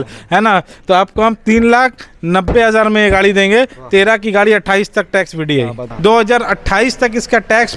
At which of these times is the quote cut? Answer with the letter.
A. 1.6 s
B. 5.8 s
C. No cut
B